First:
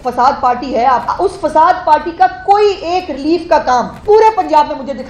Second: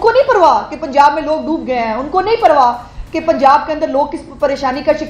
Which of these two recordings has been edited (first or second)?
first